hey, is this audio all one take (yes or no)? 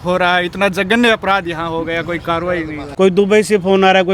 no